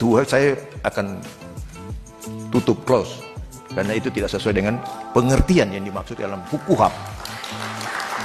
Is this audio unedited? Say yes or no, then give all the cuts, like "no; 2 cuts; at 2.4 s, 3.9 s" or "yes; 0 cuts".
yes; 0 cuts